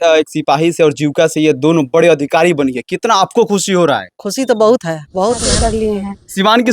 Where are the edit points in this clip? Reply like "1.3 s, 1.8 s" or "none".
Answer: 5.7 s